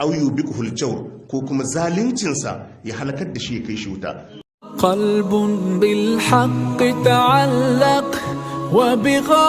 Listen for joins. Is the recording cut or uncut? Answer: cut